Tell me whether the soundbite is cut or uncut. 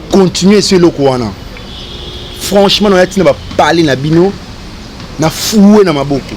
uncut